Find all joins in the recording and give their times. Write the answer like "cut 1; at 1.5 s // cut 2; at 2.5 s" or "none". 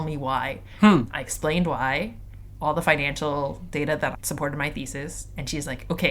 cut 1; at 4.2 s